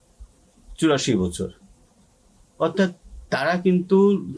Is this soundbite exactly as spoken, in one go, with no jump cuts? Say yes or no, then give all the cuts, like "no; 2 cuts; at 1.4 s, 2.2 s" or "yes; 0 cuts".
yes; 0 cuts